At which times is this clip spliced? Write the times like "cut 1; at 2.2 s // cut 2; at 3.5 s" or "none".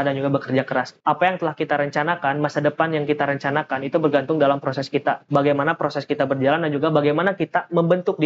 cut 1; at 0.9 s // cut 2; at 5.2 s